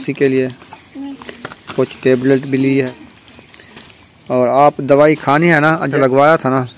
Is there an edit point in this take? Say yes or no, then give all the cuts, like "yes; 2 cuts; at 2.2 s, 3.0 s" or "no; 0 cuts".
yes; 2 cuts; at 2.9 s, 5.9 s